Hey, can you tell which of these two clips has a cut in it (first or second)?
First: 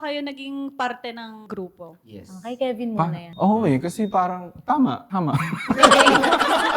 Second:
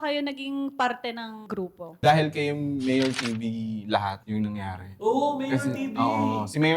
second